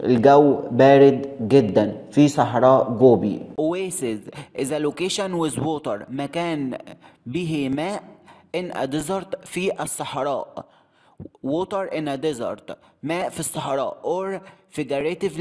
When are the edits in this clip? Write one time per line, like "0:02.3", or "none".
0:03.5